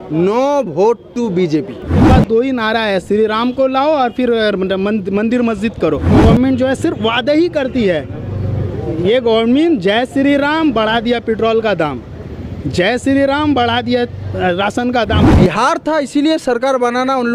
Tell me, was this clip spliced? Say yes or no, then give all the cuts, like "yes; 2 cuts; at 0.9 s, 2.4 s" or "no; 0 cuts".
yes; 3 cuts; at 2.0 s, 6.1 s, 15.2 s